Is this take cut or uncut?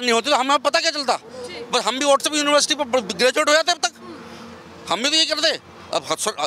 uncut